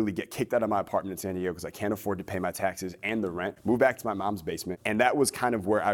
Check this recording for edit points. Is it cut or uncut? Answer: cut